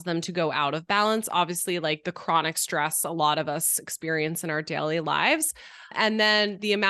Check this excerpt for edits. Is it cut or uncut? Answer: uncut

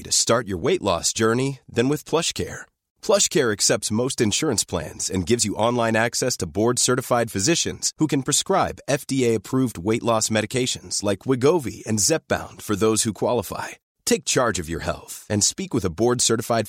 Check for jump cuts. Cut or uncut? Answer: uncut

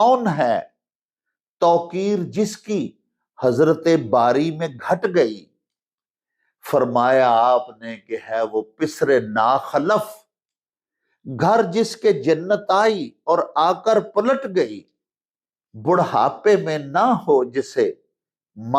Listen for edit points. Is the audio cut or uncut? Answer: uncut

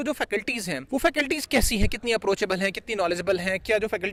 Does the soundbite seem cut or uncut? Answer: uncut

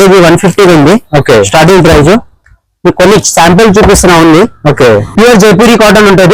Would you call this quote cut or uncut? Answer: cut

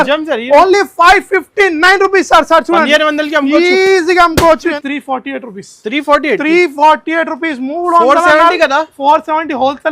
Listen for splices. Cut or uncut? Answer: cut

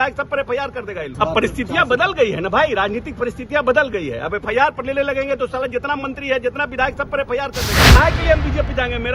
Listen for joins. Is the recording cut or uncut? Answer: cut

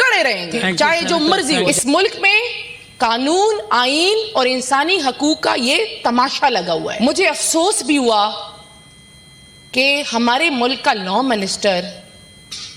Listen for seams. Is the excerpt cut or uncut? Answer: cut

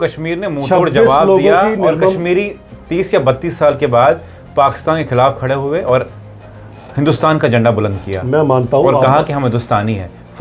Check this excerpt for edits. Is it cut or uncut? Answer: uncut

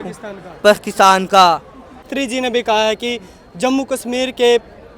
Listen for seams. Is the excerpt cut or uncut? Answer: cut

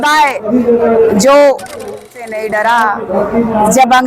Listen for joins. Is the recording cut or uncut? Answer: cut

